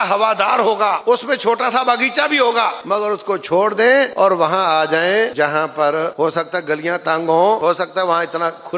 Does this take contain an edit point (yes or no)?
yes